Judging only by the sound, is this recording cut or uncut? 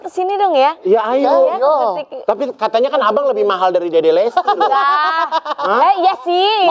uncut